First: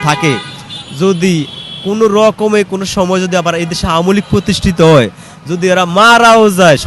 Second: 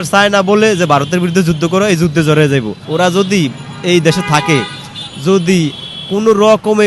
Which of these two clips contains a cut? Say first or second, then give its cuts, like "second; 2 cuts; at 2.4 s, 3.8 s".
second; 1 cut; at 2.8 s